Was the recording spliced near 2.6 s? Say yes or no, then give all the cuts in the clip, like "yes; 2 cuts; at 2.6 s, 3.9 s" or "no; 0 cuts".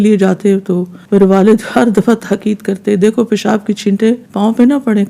no; 2 cuts; at 0.9 s, 4.3 s